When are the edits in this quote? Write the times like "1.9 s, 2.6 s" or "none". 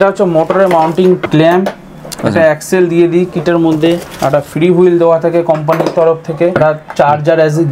1.2 s, 4.1 s, 6.5 s

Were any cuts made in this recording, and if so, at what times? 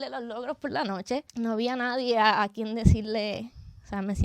1.3 s

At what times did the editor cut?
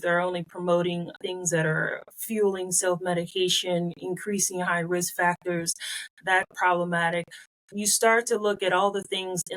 1.1 s, 6.5 s

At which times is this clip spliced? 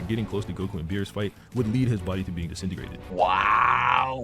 none

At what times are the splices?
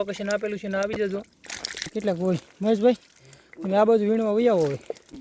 1.9 s

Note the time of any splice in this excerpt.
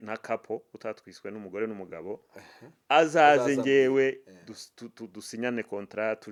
none

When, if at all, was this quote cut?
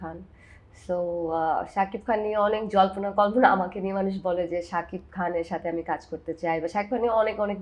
none

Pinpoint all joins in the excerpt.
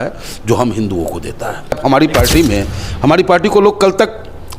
1.8 s

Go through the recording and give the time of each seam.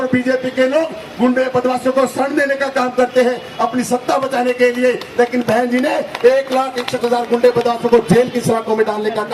none

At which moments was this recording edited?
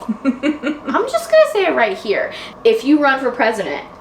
2.4 s

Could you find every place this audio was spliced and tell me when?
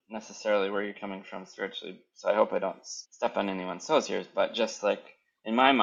none

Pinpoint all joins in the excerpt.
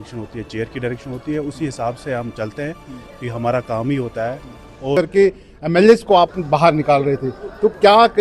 4.9 s

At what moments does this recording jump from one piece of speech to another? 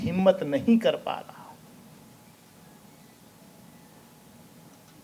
none

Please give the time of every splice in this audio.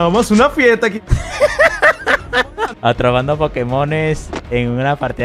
2.7 s

